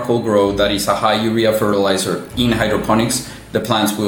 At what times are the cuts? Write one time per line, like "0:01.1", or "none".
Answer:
none